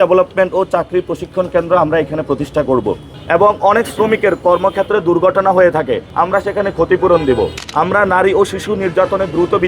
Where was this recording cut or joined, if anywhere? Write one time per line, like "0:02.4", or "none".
0:03.1
0:06.1
0:07.6